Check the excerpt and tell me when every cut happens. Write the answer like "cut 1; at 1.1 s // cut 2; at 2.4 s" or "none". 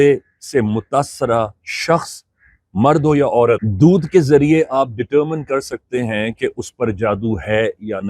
none